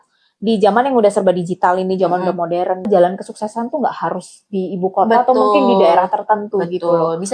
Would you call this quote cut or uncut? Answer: uncut